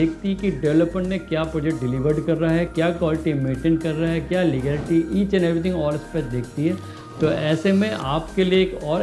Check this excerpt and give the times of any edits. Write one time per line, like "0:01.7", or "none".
none